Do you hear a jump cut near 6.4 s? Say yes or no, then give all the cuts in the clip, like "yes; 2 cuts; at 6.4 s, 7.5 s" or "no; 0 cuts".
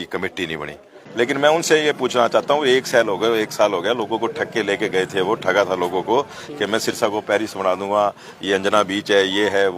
no; 1 cut; at 1.0 s